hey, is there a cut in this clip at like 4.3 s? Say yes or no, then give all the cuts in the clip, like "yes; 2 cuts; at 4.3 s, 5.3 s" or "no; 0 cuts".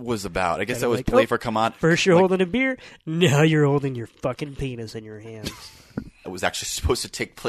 no; 1 cut; at 6.3 s